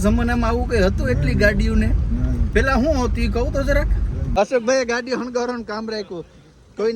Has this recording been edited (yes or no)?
yes